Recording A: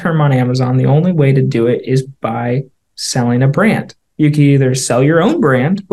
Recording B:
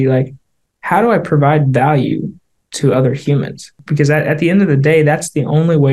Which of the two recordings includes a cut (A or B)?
B